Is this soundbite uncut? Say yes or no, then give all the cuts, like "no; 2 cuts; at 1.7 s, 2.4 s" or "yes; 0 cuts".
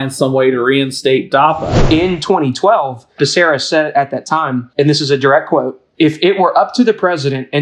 no; 4 cuts; at 1.7 s, 3.2 s, 4.7 s, 5.8 s